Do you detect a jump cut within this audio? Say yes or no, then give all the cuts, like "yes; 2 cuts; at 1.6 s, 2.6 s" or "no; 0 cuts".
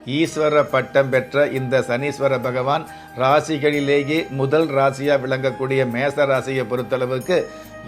no; 0 cuts